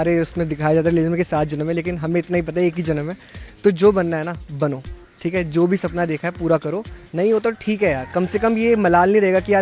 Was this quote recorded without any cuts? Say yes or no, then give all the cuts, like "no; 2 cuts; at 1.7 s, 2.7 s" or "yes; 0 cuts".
yes; 0 cuts